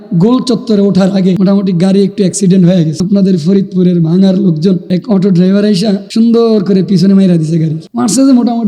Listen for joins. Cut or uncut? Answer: cut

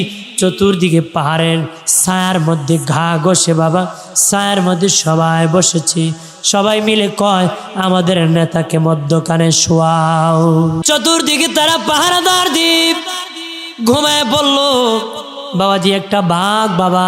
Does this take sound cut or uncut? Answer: cut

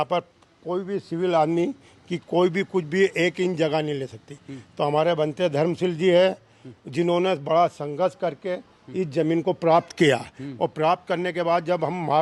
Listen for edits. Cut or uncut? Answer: uncut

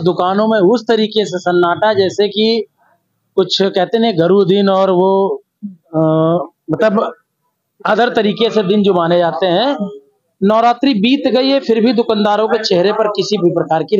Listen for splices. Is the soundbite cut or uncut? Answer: uncut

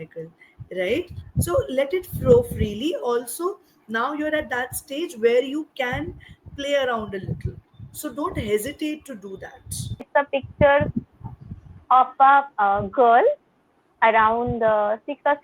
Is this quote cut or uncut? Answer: cut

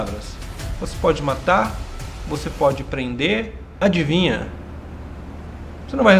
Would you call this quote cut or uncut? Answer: cut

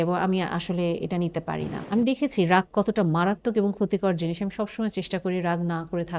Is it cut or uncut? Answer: cut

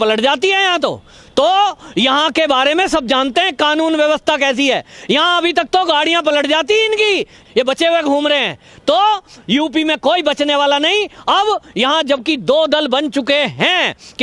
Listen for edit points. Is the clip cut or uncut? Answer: uncut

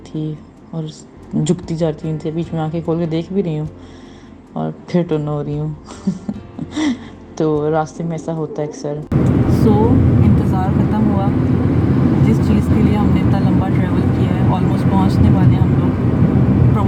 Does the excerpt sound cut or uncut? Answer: uncut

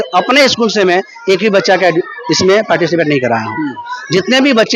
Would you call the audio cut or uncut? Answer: uncut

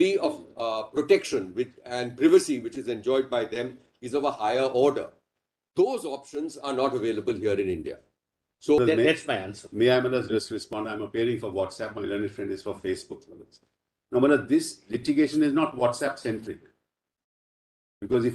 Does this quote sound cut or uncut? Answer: cut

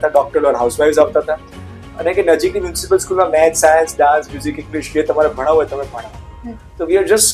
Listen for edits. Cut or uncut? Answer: uncut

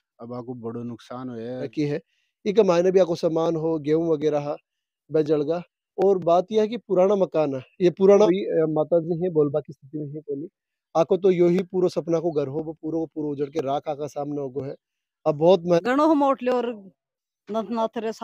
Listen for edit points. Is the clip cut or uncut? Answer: cut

